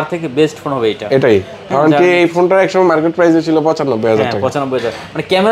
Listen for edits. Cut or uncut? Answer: uncut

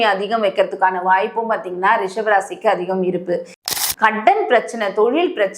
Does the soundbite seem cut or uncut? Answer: cut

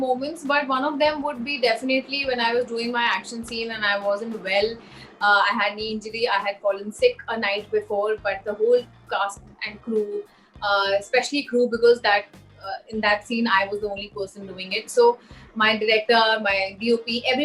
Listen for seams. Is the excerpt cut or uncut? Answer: uncut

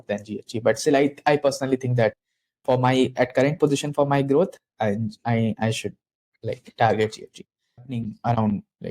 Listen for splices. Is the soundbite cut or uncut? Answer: cut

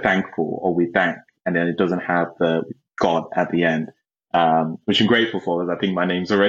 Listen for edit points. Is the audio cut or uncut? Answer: uncut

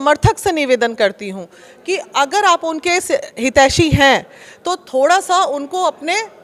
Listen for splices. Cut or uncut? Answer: uncut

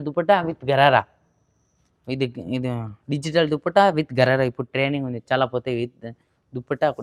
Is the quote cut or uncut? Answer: uncut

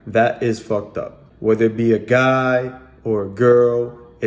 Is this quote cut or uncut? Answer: uncut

